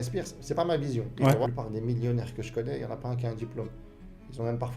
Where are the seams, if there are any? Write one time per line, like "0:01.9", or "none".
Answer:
0:01.5